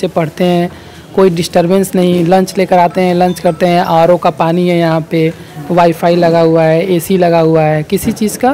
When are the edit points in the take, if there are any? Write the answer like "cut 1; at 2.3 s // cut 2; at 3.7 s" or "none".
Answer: none